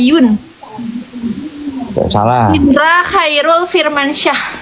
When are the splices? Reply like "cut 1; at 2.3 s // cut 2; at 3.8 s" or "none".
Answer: cut 1; at 2.5 s